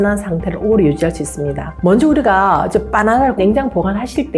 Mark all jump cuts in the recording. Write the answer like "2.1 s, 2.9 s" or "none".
3.4 s